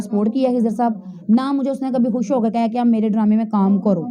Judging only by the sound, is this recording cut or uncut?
uncut